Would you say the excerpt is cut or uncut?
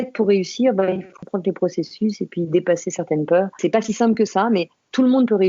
cut